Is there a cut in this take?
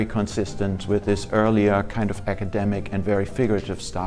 no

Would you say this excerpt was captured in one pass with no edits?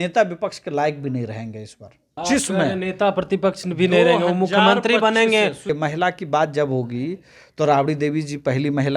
no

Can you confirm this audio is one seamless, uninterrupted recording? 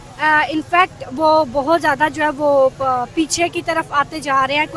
yes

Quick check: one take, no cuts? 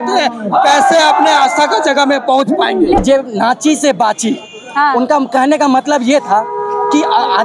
no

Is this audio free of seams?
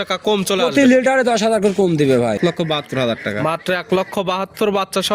no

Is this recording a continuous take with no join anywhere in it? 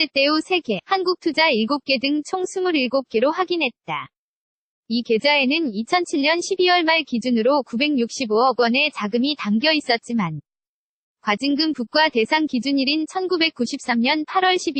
yes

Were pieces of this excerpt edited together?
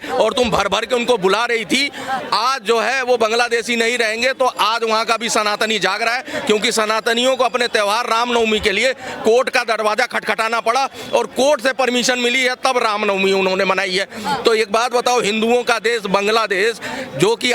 no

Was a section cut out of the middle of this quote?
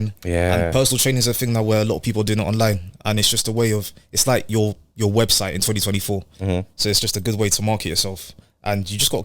no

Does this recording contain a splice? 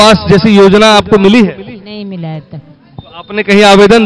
no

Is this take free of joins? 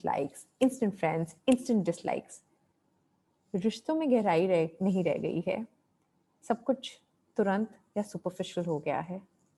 yes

